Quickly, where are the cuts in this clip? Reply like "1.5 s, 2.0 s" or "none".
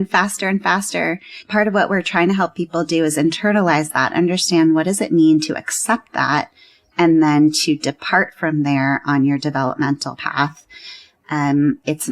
1.3 s